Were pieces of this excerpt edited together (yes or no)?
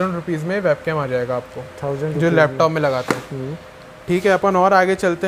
no